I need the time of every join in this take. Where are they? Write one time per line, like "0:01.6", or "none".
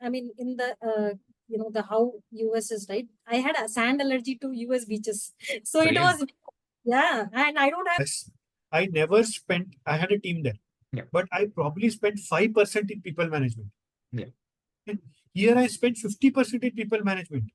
0:08.0